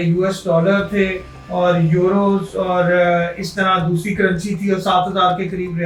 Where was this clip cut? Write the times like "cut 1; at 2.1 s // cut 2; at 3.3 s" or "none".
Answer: none